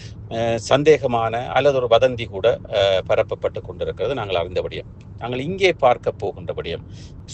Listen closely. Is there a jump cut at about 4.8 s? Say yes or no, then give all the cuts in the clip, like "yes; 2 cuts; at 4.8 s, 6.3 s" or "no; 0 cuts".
no; 0 cuts